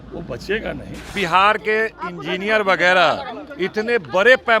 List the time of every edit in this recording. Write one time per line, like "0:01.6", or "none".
0:01.1